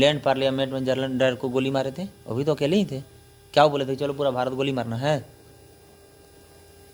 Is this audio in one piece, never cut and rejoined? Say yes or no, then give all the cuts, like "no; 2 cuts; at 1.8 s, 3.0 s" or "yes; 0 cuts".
yes; 0 cuts